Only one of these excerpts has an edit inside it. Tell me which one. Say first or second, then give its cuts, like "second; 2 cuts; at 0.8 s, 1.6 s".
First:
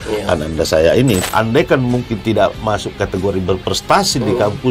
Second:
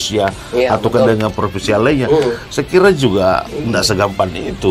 first; 1 cut; at 1.2 s